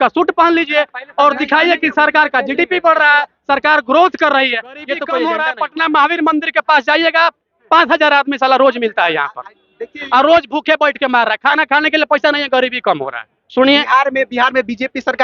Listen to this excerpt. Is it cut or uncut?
cut